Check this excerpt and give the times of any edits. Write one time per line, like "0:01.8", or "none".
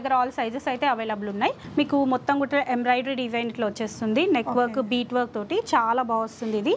0:01.6